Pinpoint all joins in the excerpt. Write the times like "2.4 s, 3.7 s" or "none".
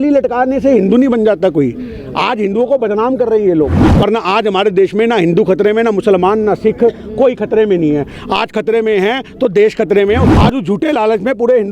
3.7 s, 10.3 s